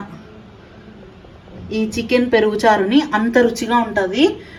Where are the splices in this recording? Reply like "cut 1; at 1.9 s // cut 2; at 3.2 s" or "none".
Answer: none

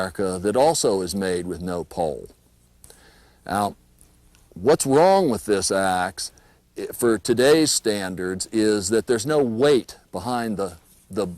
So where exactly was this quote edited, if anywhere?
cut 1; at 10.0 s

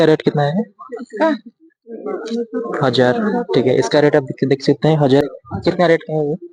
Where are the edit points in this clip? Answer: cut 1; at 5.2 s

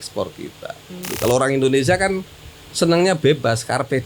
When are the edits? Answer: cut 1; at 1.1 s

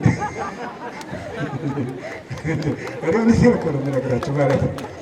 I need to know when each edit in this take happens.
none

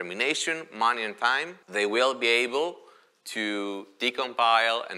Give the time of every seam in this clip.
cut 1; at 1.6 s

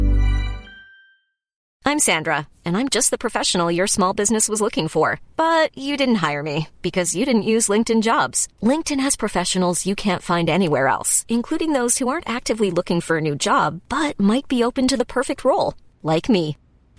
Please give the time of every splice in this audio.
cut 1; at 1.6 s

